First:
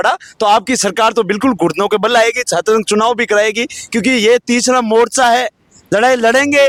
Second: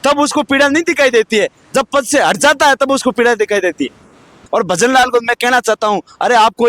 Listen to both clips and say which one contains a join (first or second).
second